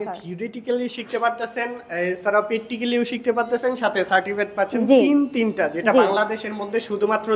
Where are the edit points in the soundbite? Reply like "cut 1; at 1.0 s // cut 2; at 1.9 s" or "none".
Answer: none